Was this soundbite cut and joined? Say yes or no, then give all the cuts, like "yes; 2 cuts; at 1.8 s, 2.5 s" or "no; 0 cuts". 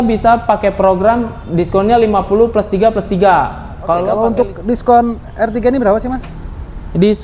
yes; 1 cut; at 4.1 s